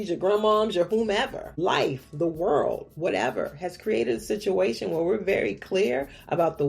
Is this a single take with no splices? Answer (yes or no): no